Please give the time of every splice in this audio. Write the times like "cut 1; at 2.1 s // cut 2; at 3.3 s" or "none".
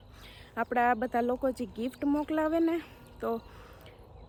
none